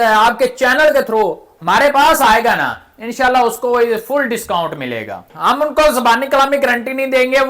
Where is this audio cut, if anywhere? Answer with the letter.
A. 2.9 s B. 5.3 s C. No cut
B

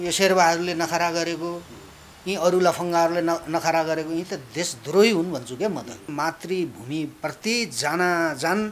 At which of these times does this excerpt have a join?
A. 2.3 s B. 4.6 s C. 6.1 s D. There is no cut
C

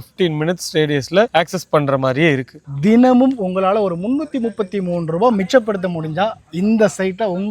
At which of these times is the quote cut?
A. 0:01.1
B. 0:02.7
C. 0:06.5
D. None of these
B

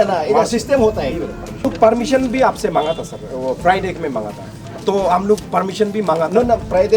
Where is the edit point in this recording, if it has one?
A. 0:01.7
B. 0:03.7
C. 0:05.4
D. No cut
A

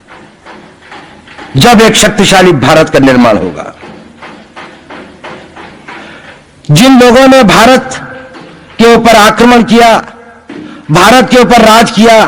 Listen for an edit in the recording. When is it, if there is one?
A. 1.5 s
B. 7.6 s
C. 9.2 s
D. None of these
D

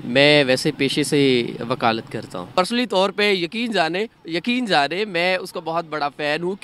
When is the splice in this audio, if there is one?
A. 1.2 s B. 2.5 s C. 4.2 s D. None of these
B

